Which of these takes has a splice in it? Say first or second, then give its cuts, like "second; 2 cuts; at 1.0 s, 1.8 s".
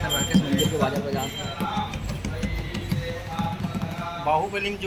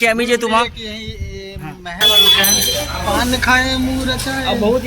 second; 1 cut; at 2.0 s